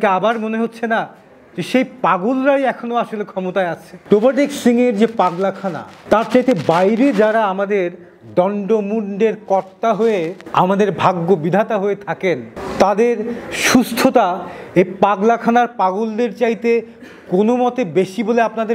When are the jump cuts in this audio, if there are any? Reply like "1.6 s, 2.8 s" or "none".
3.9 s